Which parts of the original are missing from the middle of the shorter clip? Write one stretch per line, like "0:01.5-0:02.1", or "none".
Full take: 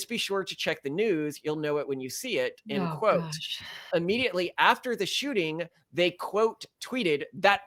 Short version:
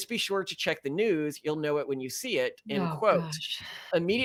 none